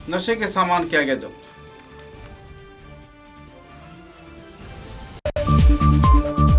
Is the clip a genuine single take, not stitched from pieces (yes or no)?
no